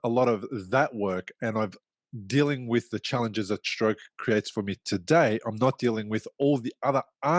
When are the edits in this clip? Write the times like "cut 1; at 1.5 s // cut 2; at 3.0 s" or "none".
none